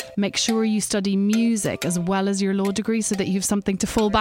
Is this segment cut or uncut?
uncut